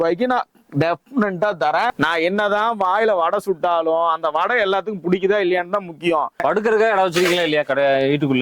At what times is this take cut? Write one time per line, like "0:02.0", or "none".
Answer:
0:01.9
0:06.4